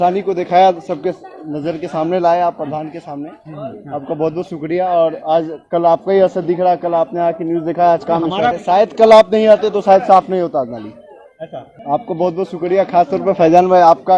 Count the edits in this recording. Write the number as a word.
two